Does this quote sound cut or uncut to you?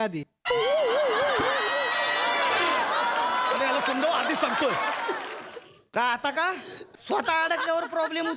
cut